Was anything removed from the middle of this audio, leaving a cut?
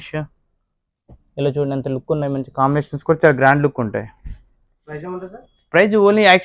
no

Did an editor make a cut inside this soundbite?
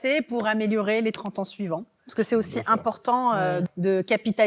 no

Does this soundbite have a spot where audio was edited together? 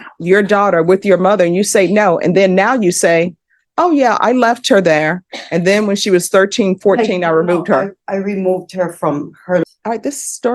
yes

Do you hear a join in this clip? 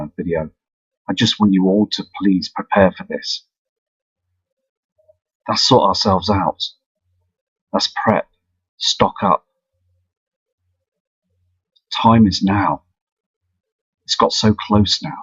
no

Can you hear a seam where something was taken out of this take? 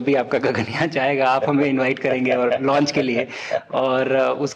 no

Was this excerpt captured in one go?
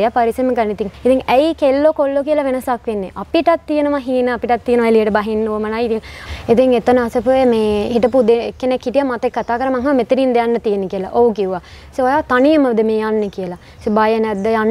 no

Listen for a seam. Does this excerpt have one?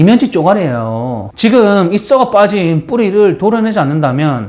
yes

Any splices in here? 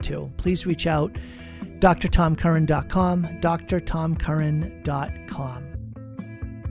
yes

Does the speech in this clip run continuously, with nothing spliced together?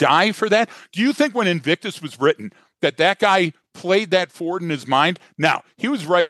yes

